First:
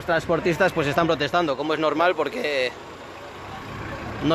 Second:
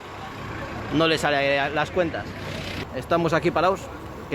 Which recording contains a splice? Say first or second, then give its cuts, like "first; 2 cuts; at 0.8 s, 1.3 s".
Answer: second; 1 cut; at 2.8 s